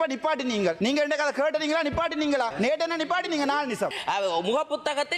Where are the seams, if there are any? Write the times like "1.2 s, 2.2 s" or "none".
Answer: 0.8 s, 2.5 s, 4.0 s